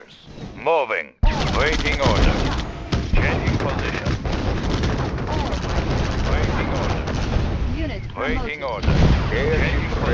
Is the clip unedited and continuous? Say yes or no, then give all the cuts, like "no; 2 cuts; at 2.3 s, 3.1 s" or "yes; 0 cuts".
yes; 0 cuts